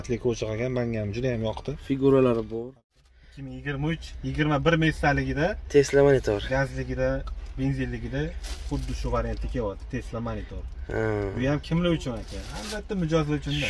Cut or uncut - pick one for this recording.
cut